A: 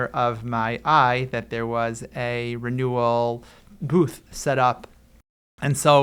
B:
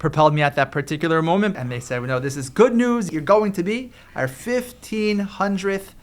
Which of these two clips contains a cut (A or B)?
B